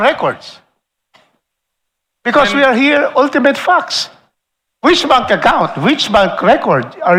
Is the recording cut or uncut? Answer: uncut